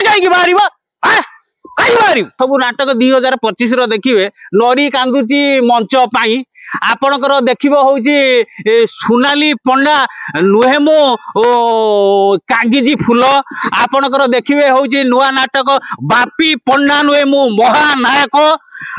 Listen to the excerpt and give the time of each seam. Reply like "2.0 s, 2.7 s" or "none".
2.4 s